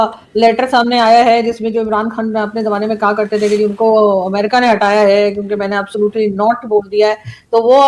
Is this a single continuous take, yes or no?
yes